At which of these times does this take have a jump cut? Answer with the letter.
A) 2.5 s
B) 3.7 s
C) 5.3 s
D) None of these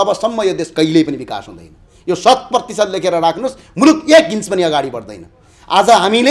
D